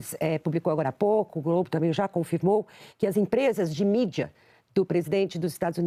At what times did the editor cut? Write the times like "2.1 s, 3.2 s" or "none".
none